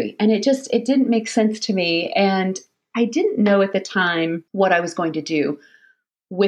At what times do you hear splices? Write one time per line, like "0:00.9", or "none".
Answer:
0:04.5